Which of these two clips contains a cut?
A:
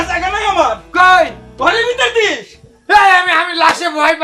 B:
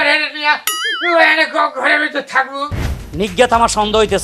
B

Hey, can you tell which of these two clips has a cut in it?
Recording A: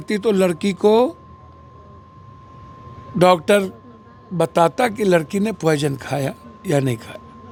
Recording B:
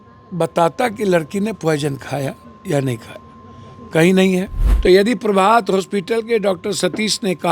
B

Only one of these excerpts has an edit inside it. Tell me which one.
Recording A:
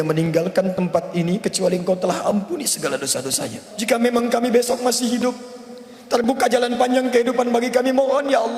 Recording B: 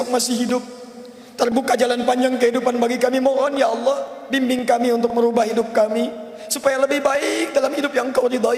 A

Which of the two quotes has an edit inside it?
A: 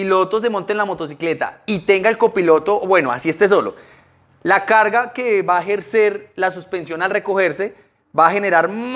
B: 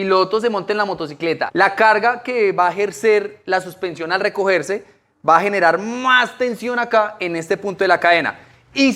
B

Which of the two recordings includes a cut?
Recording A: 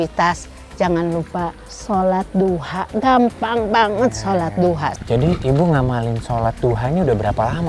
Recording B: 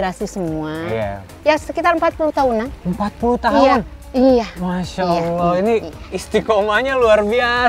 A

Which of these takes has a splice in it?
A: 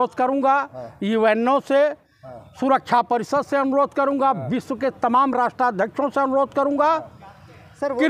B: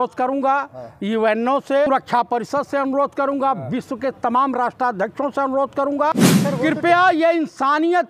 B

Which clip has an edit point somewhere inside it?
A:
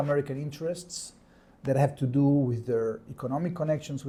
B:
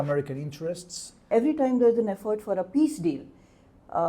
B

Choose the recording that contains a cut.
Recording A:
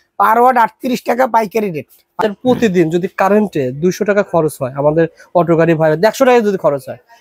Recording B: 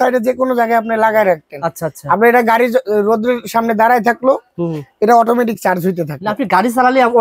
A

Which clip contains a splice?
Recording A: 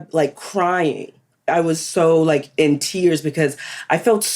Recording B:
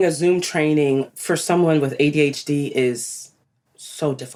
A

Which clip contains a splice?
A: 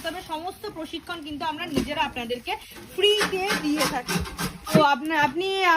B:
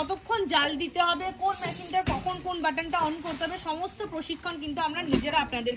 A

